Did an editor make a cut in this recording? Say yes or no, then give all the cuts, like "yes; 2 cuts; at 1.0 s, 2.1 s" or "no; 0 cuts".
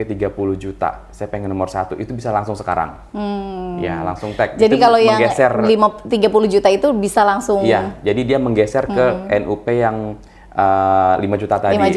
no; 0 cuts